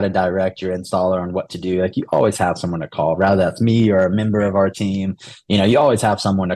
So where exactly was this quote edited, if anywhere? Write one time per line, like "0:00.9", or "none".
none

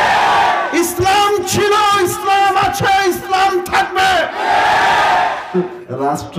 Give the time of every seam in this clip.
0:05.4

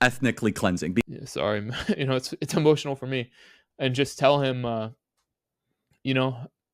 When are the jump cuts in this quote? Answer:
0:01.1

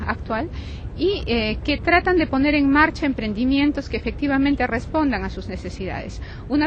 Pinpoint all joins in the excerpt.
none

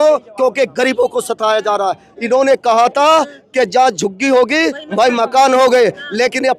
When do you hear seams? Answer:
0:02.1

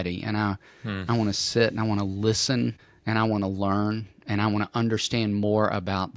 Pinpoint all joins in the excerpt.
0:02.9

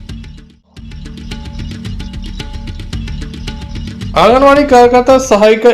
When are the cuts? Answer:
0:01.2
0:04.1

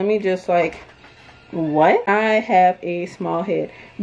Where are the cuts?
0:02.0

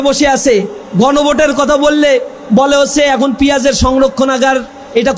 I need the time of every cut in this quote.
none

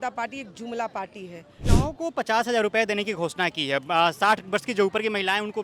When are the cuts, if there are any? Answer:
0:01.6

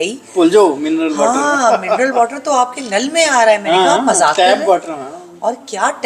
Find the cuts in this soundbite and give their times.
none

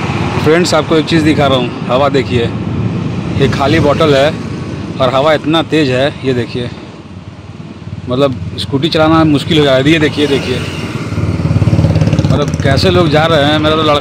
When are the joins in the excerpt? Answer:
none

